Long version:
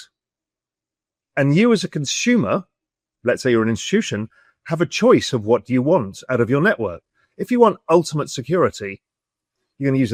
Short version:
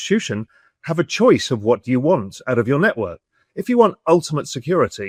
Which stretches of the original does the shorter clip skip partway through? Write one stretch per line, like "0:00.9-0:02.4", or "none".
none